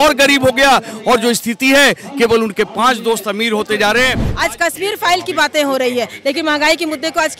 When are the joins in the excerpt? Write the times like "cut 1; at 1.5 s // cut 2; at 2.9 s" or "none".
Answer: cut 1; at 4.2 s

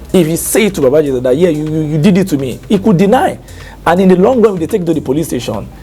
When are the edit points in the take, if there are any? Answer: none

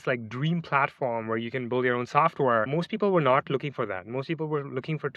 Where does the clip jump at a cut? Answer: cut 1; at 2.7 s

